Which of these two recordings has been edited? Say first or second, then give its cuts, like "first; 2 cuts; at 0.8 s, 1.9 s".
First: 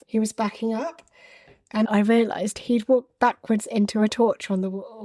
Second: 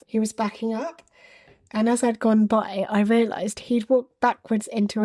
first; 1 cut; at 1.9 s